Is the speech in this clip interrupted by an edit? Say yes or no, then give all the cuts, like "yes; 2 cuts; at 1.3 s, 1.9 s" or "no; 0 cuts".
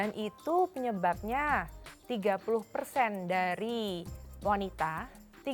no; 0 cuts